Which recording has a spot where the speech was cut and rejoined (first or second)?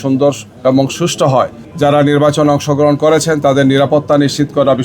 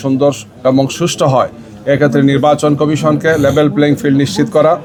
first